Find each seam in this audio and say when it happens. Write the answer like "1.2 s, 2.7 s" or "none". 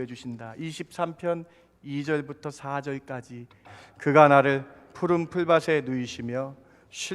3.8 s